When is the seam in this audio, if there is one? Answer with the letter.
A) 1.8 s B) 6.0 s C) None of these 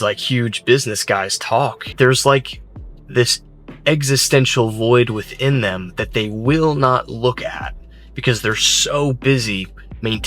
A